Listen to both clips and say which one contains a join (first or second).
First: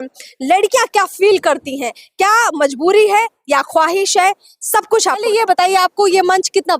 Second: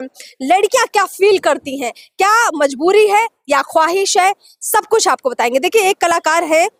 first